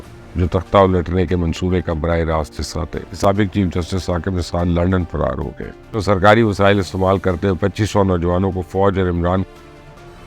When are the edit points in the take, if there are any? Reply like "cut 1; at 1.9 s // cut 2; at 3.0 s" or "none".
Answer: cut 1; at 3.1 s // cut 2; at 6.0 s

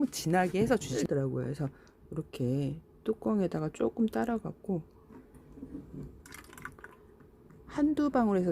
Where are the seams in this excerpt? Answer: cut 1; at 0.9 s

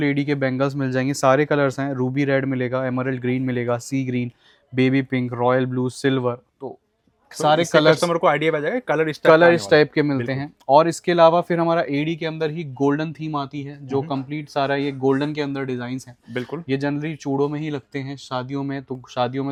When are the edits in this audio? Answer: none

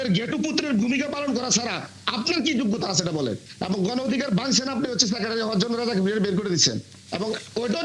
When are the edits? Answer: cut 1; at 3.5 s

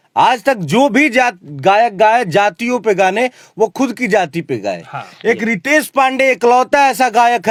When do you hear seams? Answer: none

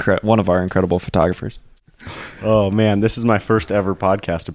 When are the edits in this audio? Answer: cut 1; at 1.4 s

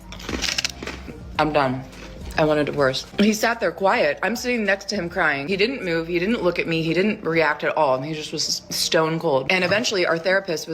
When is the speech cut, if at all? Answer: cut 1; at 3.8 s

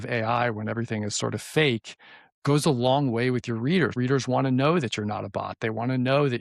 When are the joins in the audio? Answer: cut 1; at 3.9 s

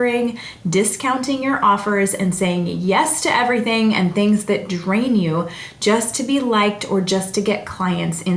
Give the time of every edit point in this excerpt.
none

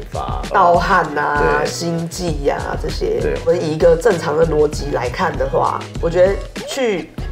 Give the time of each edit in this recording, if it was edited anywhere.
cut 1; at 3.4 s // cut 2; at 5.9 s

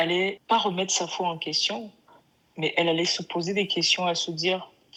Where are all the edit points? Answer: none

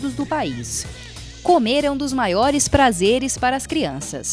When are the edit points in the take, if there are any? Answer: cut 1; at 1.1 s

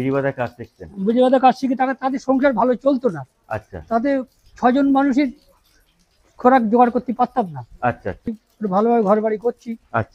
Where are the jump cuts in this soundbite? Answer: cut 1; at 8.3 s

